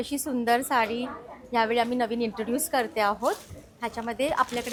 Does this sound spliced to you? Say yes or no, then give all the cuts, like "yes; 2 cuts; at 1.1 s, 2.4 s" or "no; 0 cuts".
no; 0 cuts